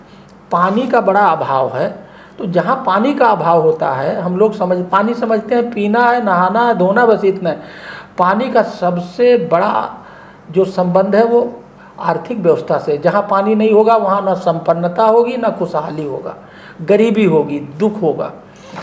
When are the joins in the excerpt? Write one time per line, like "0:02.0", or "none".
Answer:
none